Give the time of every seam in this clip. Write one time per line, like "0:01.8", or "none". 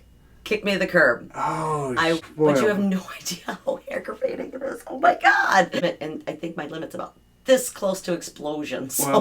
0:02.2
0:05.8